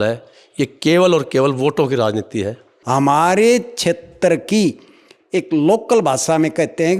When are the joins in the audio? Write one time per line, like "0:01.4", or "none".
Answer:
0:02.7